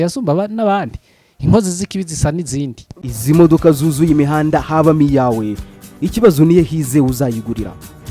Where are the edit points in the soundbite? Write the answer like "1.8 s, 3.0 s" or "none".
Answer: 2.9 s